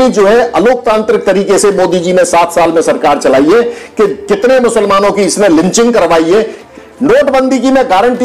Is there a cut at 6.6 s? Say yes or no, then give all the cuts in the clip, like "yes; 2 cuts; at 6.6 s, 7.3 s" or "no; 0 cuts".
yes; 1 cut; at 6.6 s